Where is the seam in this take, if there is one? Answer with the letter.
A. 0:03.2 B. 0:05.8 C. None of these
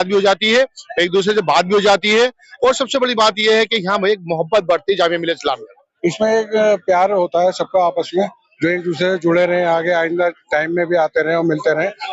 B